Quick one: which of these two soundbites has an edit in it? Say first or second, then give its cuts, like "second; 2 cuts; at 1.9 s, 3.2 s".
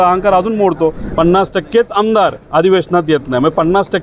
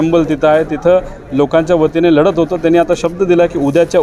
first; 1 cut; at 1.0 s